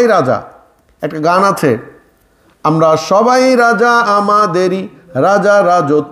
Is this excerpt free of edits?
yes; 0 cuts

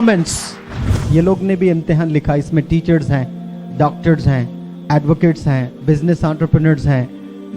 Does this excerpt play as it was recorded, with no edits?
no; 1 cut; at 1.0 s

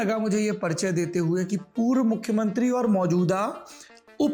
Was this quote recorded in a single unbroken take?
yes; 0 cuts

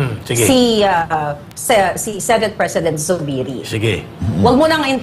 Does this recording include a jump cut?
no; 0 cuts

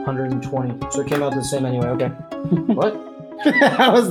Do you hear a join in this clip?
no; 0 cuts

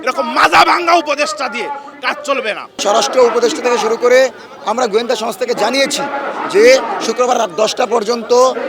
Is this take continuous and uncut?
no; 1 cut; at 2.7 s

